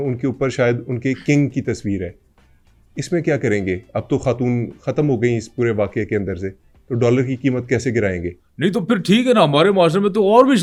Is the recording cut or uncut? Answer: uncut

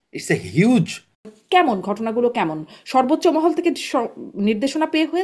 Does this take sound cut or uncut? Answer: cut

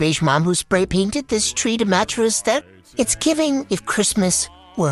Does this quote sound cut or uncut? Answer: uncut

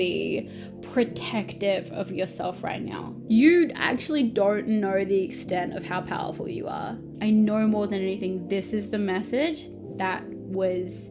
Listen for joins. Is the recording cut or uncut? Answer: cut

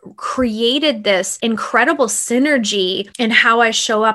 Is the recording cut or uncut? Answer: cut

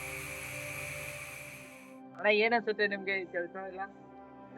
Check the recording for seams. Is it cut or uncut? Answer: cut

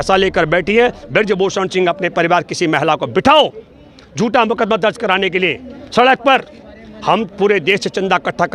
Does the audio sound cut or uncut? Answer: uncut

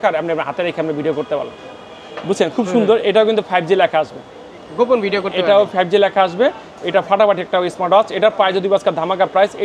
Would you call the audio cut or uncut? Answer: uncut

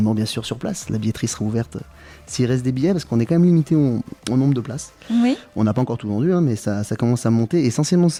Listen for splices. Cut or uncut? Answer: uncut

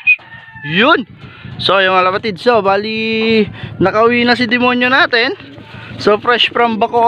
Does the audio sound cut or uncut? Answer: uncut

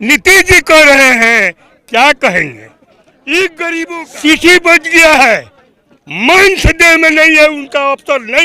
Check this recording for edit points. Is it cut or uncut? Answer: cut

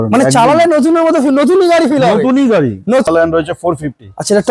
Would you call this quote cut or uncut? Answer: cut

